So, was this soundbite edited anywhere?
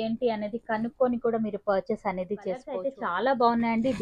yes; 1 cut; at 2.7 s

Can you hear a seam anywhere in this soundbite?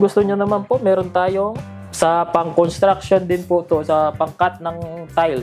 no; 0 cuts

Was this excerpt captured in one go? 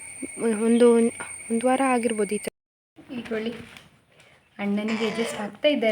no; 1 cut; at 2.5 s

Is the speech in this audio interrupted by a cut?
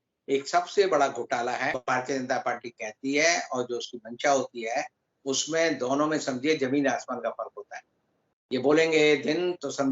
yes; 1 cut; at 1.8 s

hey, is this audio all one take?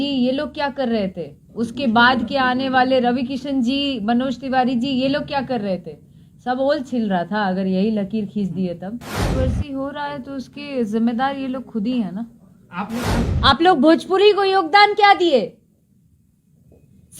no; 2 cuts; at 9.3 s, 13.2 s

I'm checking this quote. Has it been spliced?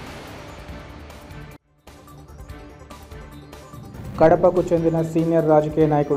yes; 1 cut; at 3.9 s

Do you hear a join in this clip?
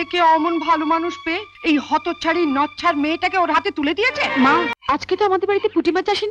yes; 1 cut; at 4.7 s

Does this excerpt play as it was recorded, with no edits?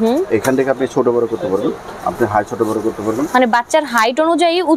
yes; 0 cuts

